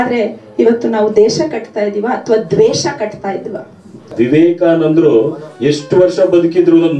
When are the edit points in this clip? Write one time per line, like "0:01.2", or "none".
0:03.9